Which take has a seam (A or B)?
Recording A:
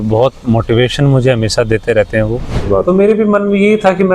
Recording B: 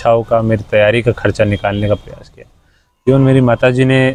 A